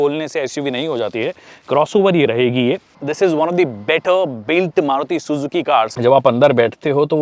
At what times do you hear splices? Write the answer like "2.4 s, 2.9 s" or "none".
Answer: 3.0 s, 5.9 s